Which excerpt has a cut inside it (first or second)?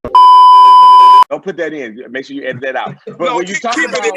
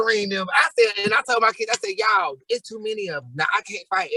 first